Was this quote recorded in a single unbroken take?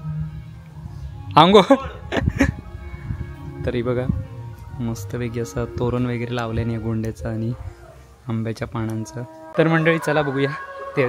no; 1 cut; at 9.4 s

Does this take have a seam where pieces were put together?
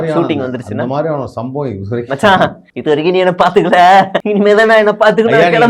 yes; 2 cuts; at 2.7 s, 4.2 s

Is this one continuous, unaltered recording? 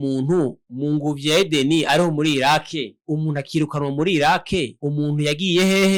yes; 0 cuts

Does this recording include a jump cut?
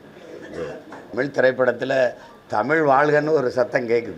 yes; 1 cut; at 1.1 s

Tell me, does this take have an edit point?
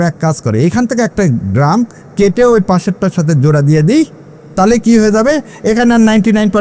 no; 0 cuts

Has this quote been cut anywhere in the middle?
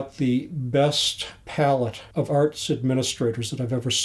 no; 0 cuts

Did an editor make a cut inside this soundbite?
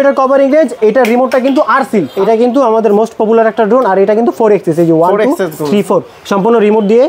yes; 1 cut; at 2.1 s

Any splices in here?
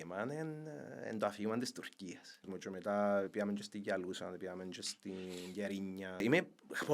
yes; 2 cuts; at 2.4 s, 6.2 s

